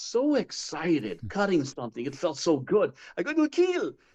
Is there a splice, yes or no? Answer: no